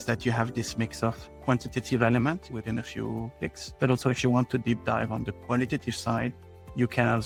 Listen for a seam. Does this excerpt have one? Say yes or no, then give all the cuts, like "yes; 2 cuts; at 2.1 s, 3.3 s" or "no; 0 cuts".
no; 0 cuts